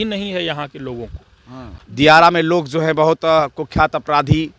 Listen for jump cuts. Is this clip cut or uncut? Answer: cut